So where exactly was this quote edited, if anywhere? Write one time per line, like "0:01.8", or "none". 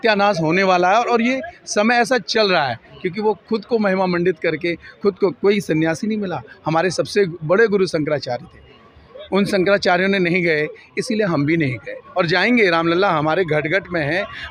none

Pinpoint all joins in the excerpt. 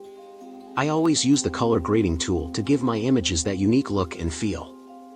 0:01.0

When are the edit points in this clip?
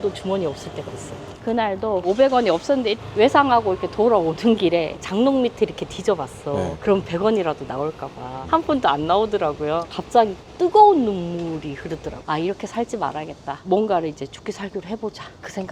0:01.3
0:02.9
0:08.3

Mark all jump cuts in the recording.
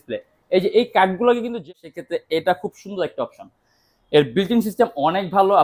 0:01.7

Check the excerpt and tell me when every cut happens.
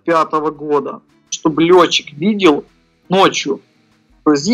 0:01.3

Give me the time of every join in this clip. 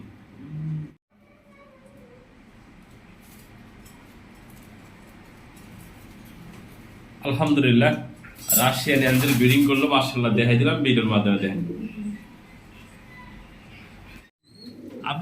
0:01.1
0:14.3

